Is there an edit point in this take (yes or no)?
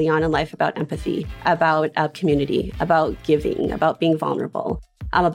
yes